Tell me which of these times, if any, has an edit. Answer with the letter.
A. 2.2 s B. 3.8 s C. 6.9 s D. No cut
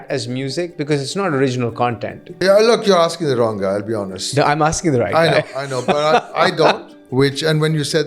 C